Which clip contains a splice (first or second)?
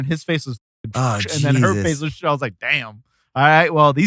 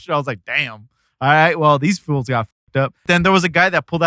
second